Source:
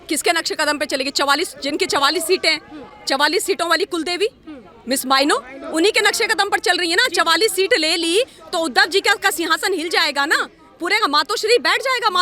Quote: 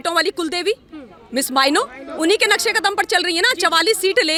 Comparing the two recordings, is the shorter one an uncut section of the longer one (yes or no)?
yes